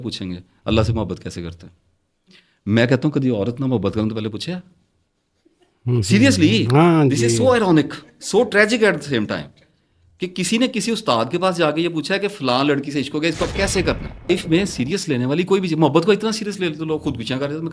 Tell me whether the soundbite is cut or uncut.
cut